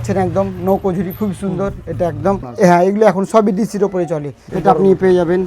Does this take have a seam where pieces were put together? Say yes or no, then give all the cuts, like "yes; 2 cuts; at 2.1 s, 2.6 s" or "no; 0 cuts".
yes; 2 cuts; at 2.5 s, 4.4 s